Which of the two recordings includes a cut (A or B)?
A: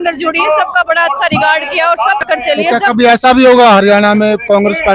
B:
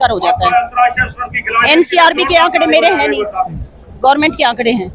A